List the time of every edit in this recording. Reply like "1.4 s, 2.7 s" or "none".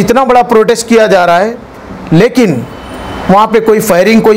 none